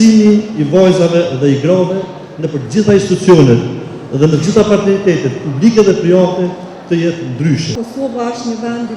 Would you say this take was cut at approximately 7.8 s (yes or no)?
yes